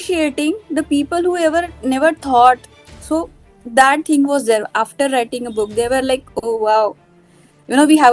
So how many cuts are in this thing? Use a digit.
0